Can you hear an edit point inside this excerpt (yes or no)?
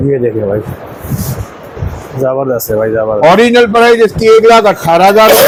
no